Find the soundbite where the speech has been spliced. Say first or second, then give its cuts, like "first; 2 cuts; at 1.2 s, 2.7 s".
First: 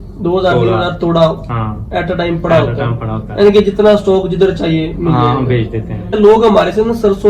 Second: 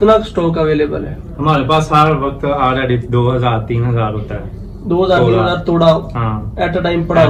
first; 1 cut; at 6.1 s